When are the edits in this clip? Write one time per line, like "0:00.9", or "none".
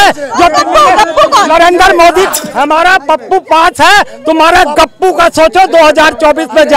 0:02.3